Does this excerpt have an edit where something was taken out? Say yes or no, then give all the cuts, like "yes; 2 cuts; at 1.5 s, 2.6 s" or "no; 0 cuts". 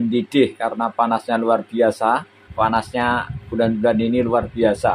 yes; 1 cut; at 2.4 s